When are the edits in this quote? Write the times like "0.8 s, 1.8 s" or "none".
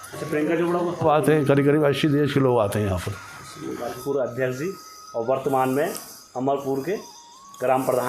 1.0 s, 4.0 s